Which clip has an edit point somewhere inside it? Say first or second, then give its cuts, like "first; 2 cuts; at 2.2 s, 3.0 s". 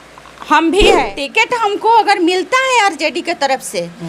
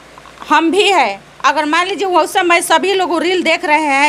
first; 1 cut; at 1.2 s